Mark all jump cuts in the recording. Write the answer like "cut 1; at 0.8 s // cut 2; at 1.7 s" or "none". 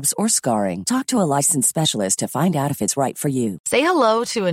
cut 1; at 3.6 s